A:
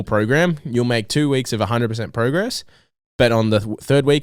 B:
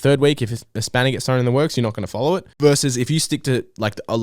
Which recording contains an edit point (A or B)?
B